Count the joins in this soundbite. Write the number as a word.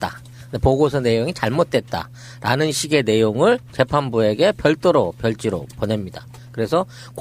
one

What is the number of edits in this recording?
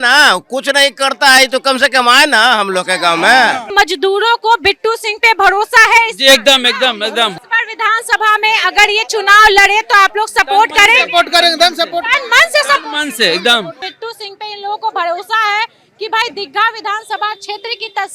three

